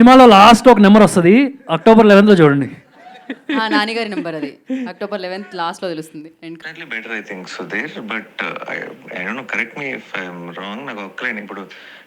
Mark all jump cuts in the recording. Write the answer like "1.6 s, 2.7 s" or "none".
6.6 s